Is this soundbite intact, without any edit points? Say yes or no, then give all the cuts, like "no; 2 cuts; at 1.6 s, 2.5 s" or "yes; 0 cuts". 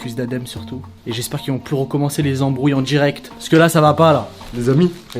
yes; 0 cuts